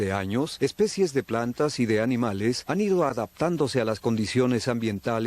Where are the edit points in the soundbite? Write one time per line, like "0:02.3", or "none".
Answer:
none